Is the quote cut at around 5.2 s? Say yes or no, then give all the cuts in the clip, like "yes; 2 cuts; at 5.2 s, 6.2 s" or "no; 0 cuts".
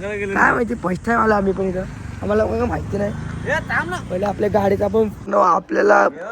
yes; 1 cut; at 5.2 s